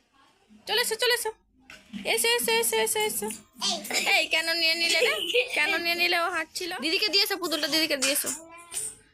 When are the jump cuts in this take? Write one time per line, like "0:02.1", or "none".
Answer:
0:06.6

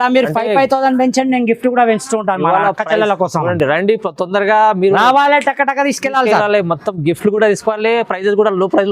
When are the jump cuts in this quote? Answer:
none

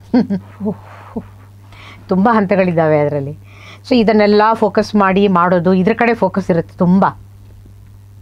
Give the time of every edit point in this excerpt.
none

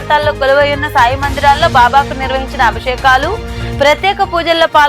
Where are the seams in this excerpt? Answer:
none

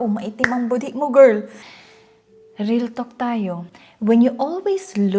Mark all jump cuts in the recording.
0:01.8

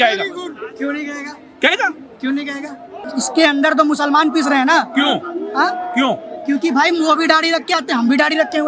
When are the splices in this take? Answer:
0:03.0

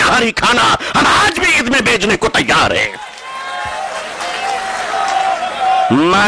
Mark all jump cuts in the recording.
none

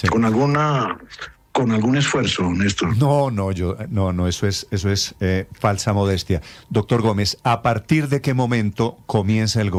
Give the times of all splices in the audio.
none

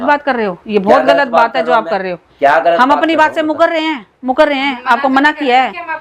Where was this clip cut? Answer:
none

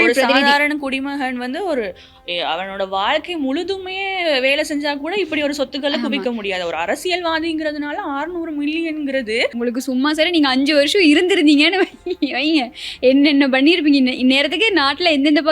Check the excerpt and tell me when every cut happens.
0:09.5

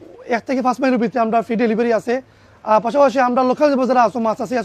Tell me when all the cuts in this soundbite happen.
none

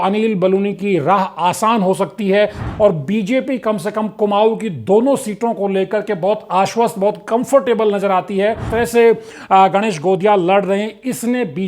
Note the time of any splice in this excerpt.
0:02.6
0:08.6

